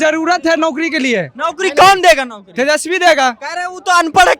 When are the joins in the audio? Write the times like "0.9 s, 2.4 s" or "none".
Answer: none